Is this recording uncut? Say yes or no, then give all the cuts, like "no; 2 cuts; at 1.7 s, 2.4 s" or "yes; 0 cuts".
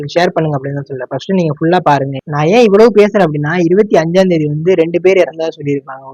no; 1 cut; at 2.2 s